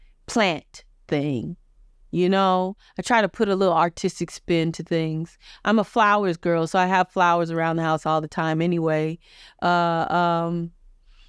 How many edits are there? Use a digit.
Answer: 0